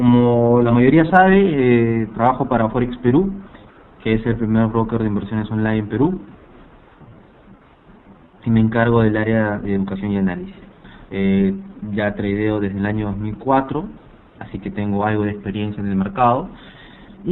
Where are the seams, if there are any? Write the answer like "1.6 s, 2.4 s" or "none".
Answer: 12.7 s